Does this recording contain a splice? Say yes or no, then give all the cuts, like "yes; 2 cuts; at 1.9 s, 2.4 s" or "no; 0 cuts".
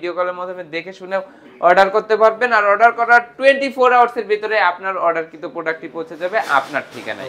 no; 0 cuts